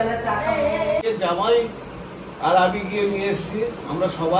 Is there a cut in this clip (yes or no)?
yes